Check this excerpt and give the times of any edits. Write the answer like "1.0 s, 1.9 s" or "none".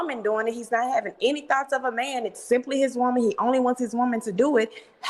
none

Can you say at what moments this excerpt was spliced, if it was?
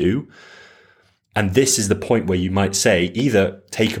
none

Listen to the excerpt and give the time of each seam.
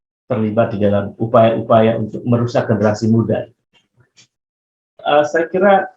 4.9 s

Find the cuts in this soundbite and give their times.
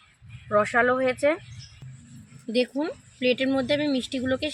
1.9 s

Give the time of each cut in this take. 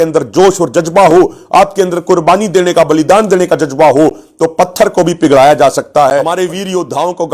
6.3 s

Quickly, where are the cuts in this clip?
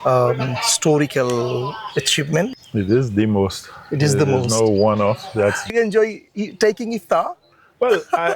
2.6 s, 5.6 s

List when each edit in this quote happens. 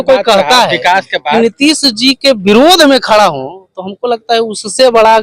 none

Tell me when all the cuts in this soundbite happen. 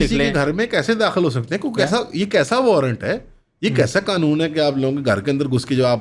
none

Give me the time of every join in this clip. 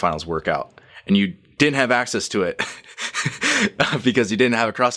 none

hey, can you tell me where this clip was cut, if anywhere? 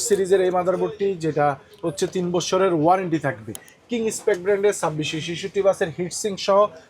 3.6 s

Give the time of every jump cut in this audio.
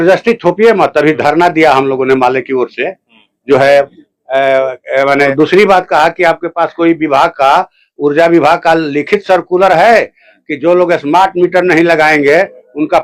0.8 s, 5.3 s

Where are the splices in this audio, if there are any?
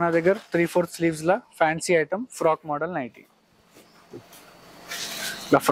none

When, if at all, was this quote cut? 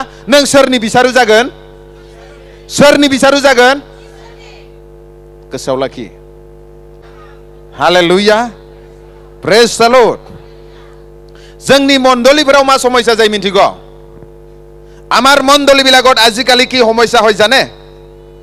none

